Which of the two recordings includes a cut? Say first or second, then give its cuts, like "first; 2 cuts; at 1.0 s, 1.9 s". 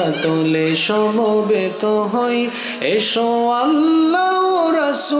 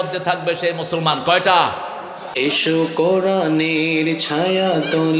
second; 1 cut; at 2.3 s